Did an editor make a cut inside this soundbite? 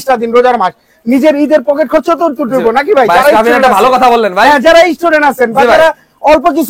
no; 0 cuts

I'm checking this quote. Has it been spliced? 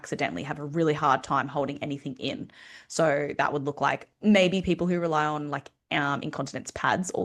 no; 0 cuts

